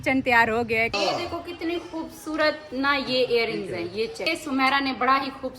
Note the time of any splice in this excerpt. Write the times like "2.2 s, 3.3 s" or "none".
0.9 s, 4.3 s